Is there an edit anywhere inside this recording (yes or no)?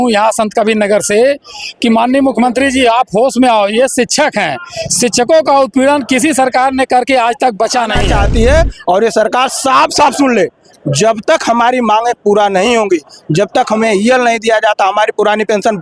yes